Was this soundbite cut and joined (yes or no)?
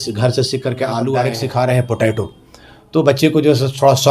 yes